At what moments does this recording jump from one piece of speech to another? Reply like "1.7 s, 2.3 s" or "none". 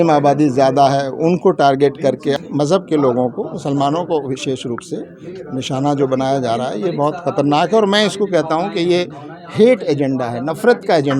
2.4 s